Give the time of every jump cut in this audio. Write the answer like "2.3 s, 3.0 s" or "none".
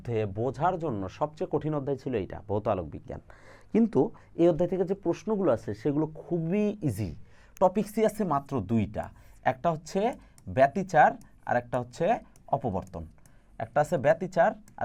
none